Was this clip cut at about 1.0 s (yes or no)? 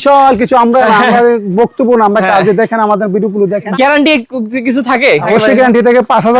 no